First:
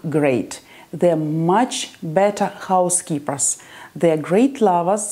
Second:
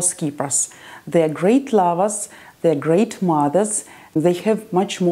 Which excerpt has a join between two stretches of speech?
second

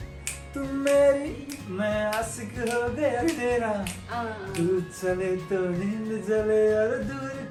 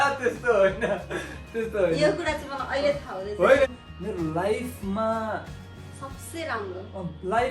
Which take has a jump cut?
second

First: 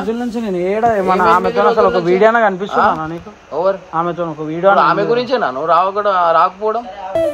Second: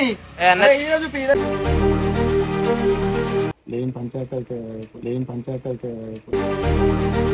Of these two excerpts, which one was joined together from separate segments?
second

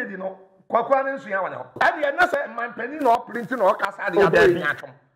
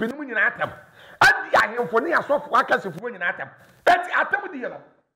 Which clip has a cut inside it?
first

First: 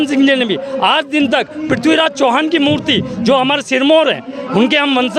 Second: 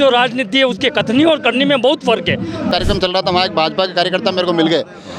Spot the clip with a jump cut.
second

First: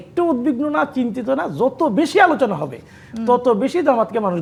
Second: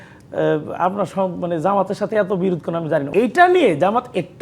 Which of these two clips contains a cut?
second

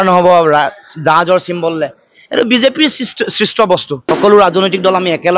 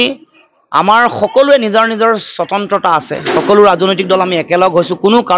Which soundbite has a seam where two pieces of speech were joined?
first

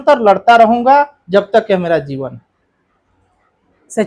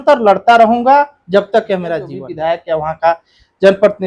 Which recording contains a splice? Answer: second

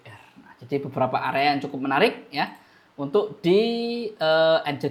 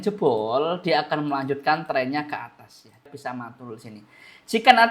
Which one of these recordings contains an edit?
second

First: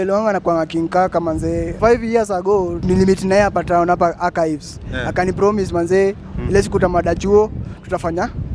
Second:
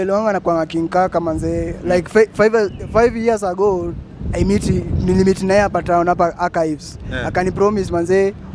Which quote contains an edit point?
first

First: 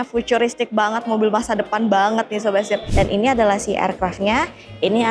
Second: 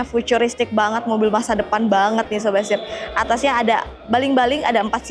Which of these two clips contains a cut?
first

